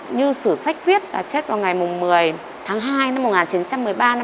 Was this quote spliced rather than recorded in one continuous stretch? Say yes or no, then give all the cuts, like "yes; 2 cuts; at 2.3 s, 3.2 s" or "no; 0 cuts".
yes; 1 cut; at 2.5 s